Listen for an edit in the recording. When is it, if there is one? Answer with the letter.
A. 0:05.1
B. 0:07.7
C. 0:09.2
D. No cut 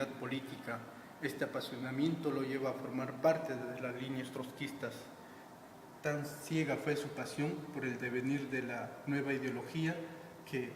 A